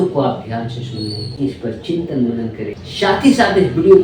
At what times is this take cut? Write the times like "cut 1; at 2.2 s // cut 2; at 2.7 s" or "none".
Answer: cut 1; at 1.2 s